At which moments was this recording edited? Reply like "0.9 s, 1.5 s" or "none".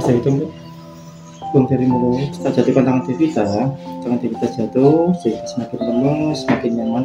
2.4 s

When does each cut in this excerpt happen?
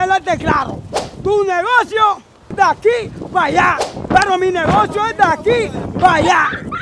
none

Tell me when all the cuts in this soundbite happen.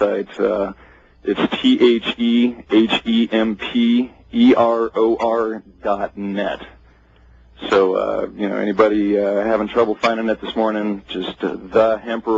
3.3 s

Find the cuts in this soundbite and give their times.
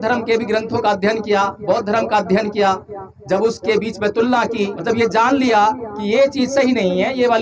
4.8 s

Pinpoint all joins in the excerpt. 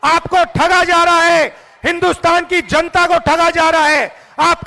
none

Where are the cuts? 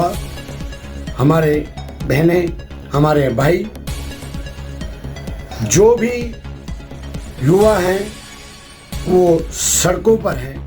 none

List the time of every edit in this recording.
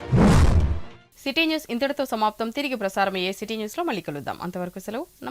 none

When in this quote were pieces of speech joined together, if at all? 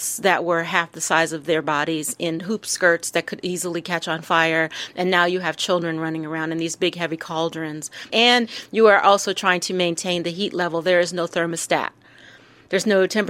8.1 s

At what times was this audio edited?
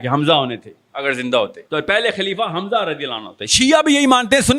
1.6 s

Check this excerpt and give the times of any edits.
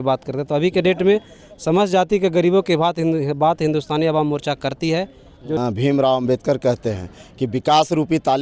5.6 s

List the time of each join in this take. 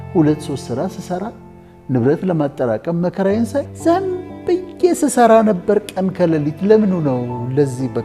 3.7 s

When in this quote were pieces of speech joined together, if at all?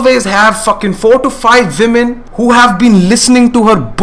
2.2 s

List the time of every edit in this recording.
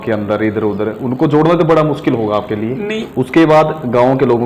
3.0 s

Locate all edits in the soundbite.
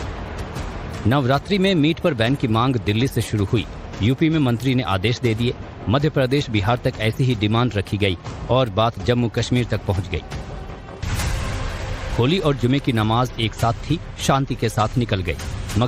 none

